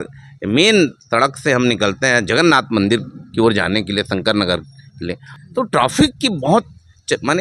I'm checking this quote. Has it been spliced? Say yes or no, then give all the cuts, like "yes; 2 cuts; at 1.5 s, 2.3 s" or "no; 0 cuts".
yes; 1 cut; at 5.3 s